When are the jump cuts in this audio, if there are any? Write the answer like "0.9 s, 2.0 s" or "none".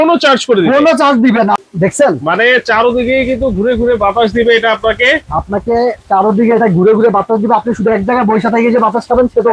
1.6 s

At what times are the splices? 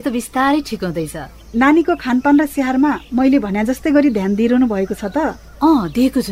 1.5 s, 5.4 s

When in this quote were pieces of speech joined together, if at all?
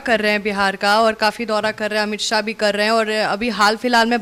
none

